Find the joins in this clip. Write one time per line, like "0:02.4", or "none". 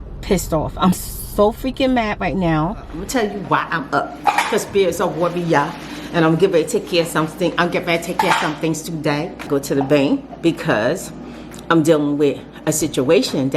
0:03.0
0:09.5